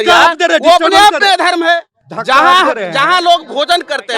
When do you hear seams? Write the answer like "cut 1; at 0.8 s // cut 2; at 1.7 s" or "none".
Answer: none